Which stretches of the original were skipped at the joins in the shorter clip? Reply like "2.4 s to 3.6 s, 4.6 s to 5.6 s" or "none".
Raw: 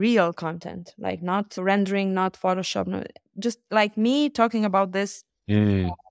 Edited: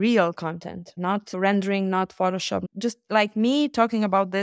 0.9 s to 1.1 s, 2.9 s to 3.3 s